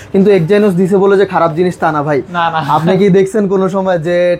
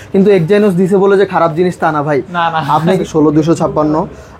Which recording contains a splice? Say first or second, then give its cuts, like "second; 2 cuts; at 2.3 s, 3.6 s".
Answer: second; 1 cut; at 3.0 s